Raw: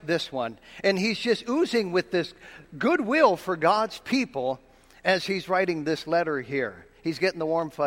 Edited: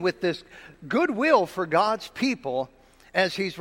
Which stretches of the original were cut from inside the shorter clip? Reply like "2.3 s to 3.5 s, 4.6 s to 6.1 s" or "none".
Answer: none